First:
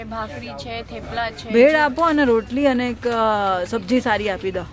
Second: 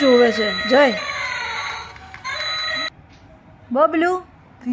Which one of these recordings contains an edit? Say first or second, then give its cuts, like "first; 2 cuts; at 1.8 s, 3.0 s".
second; 1 cut; at 2.9 s